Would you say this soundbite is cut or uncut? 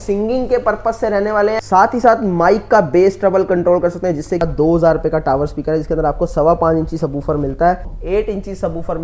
cut